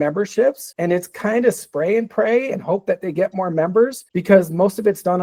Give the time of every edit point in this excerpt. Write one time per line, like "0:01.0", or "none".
none